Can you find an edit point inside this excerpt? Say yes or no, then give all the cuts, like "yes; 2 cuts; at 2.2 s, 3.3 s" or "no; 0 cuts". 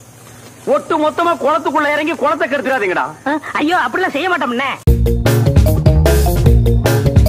yes; 1 cut; at 4.9 s